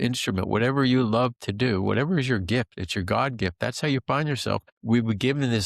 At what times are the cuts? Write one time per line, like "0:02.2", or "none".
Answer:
0:04.6